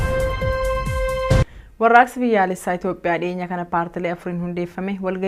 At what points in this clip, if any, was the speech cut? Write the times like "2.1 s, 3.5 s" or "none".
none